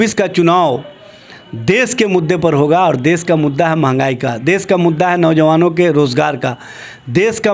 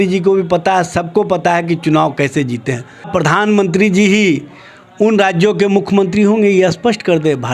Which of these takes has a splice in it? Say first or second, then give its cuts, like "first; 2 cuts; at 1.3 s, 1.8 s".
second; 1 cut; at 3.1 s